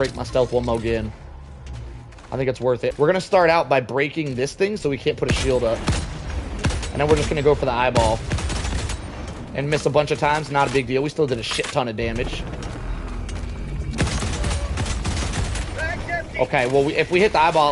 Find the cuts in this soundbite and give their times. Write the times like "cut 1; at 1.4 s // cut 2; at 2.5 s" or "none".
cut 1; at 2.9 s